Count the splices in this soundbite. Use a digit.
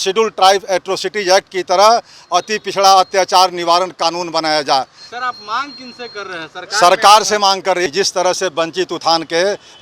1